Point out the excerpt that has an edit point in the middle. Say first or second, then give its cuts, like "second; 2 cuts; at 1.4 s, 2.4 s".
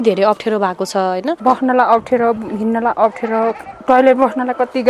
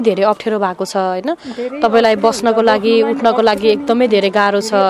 first; 2 cuts; at 1.4 s, 3.7 s